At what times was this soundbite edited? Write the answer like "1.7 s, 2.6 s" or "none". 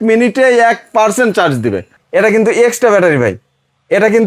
1.9 s